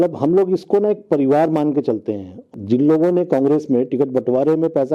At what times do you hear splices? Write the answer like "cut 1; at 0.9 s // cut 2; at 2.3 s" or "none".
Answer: cut 1; at 2.5 s